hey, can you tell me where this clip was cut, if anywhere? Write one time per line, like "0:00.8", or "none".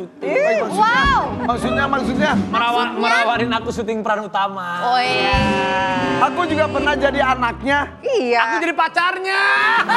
none